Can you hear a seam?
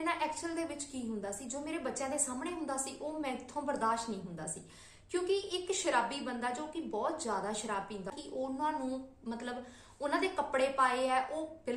yes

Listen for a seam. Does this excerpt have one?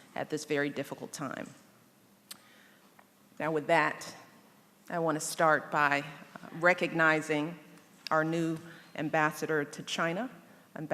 yes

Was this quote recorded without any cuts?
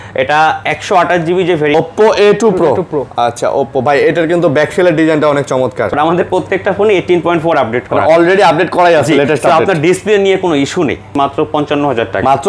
no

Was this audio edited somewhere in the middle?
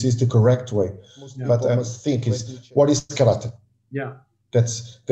yes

